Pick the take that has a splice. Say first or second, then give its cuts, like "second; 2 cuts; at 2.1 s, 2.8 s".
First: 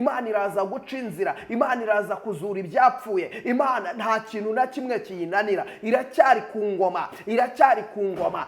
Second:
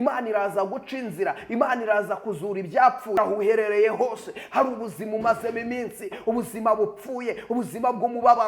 second; 1 cut; at 3.2 s